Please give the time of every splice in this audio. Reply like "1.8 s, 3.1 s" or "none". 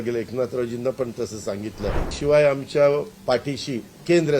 2.1 s